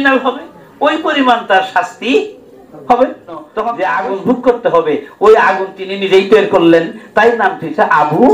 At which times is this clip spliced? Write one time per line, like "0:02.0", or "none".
0:03.5